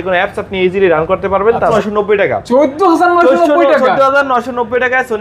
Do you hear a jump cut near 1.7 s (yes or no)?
yes